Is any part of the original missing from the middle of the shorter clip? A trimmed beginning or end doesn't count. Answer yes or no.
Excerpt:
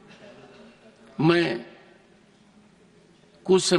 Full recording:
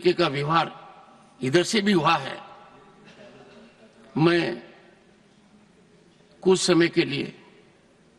no